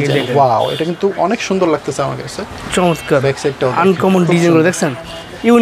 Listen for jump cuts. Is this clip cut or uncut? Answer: uncut